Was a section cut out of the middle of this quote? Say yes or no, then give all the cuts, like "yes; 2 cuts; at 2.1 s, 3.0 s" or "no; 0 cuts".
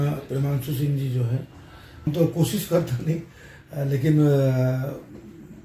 yes; 1 cut; at 2.1 s